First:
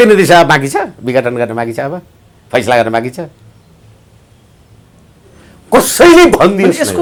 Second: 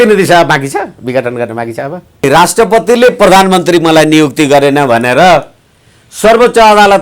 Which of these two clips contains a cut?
second; 1 cut; at 2.2 s

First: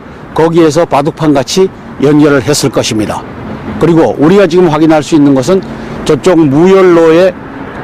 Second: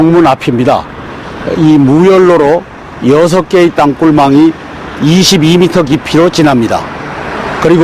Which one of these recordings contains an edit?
first; 1 cut; at 4.5 s

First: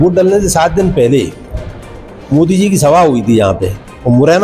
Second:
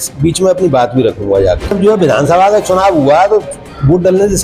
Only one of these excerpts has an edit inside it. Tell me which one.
second; 1 cut; at 1.8 s

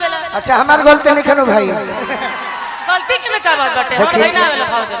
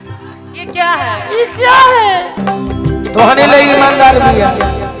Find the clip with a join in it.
second; 1 cut; at 2.4 s

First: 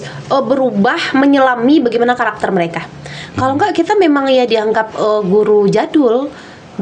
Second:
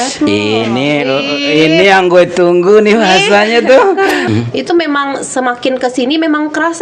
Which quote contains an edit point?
second; 1 cut; at 4.2 s

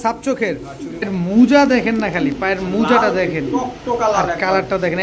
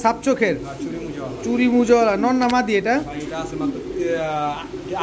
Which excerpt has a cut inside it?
first; 1 cut; at 1.1 s

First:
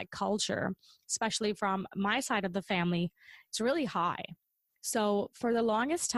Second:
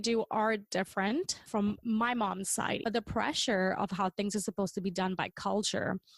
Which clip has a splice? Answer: second; 2 cuts; at 1.5 s, 2.8 s

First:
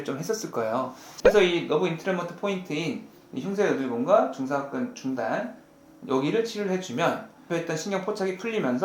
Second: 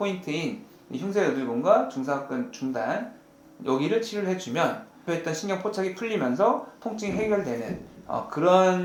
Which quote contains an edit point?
first; 1 cut; at 1.0 s

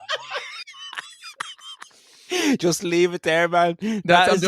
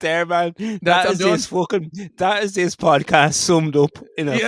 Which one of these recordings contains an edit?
first; 1 cut; at 2.1 s

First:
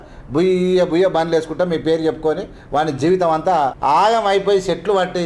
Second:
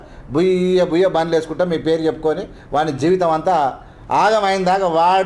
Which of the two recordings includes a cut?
first; 1 cut; at 3.8 s

